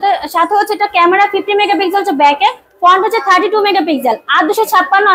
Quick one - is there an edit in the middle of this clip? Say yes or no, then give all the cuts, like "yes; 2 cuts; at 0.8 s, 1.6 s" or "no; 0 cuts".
no; 0 cuts